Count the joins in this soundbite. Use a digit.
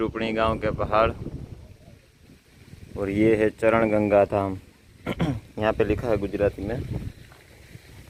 0